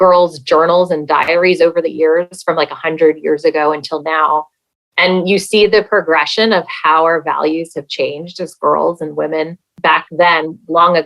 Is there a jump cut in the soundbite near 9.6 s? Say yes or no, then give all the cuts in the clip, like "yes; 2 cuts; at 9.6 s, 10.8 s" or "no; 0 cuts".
yes; 2 cuts; at 1.3 s, 9.6 s